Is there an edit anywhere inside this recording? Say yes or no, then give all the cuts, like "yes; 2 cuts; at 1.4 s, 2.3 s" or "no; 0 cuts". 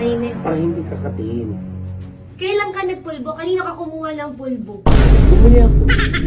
no; 0 cuts